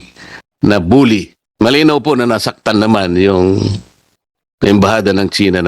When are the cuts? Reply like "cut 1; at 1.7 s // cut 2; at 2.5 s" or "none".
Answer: cut 1; at 1.4 s